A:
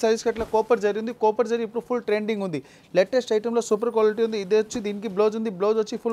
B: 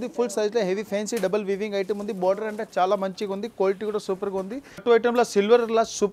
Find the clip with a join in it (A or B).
B